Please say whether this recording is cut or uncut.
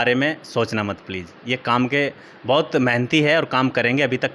uncut